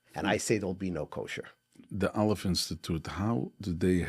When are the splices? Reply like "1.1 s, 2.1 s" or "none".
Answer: 1.9 s